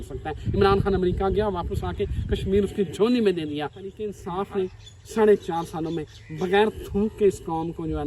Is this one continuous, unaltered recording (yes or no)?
no